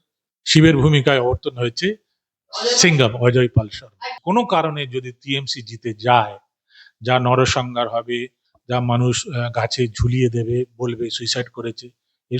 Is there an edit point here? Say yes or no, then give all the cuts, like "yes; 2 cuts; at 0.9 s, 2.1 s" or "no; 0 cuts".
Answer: yes; 1 cut; at 4.1 s